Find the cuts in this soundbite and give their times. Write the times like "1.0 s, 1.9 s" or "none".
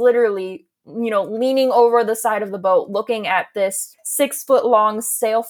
3.9 s